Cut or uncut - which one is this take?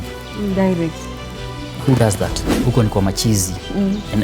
cut